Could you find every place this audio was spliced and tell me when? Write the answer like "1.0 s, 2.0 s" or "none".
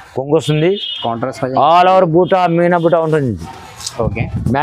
none